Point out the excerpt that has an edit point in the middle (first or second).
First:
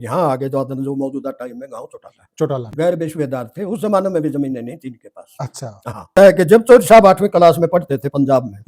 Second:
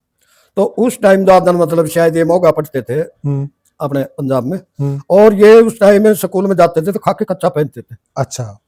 first